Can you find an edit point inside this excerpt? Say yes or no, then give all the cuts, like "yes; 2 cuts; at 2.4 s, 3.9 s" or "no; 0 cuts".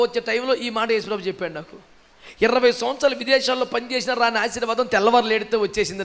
no; 0 cuts